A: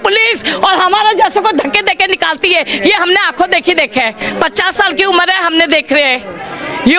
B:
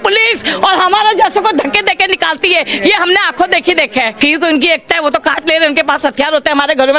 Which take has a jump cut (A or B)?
B